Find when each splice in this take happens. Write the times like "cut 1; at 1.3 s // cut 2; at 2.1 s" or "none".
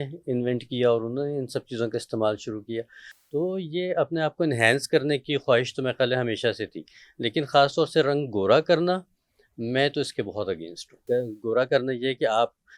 cut 1; at 11.0 s